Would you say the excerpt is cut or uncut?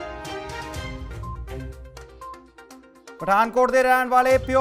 uncut